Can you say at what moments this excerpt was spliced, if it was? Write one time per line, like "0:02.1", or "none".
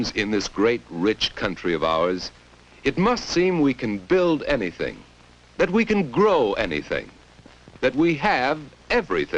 0:07.0

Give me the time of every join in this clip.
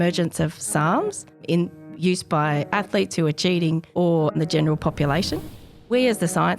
0:01.4
0:04.3
0:05.9

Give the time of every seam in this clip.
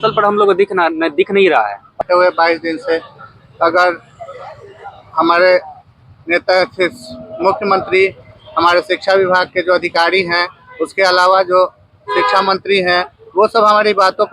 0:01.9

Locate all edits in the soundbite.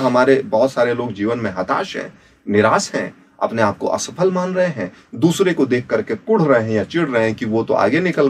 none

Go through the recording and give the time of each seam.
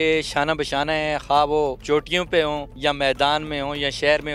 0:01.8
0:02.7

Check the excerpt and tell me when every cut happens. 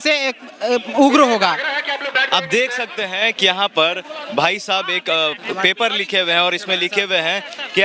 none

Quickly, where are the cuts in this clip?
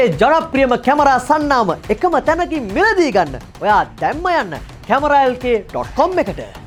none

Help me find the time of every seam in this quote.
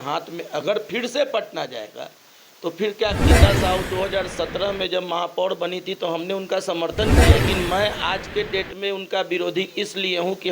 0:03.2
0:07.3

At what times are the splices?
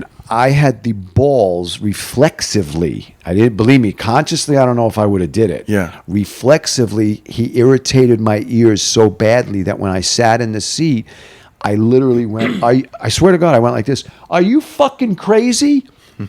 none

